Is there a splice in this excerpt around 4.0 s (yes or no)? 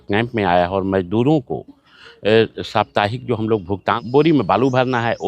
yes